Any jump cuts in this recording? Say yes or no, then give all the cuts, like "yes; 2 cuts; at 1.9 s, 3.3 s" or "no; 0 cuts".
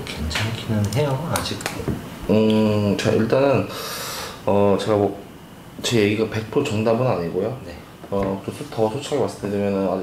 no; 0 cuts